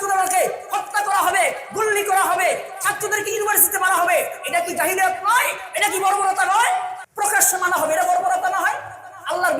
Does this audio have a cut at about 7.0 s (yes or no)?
yes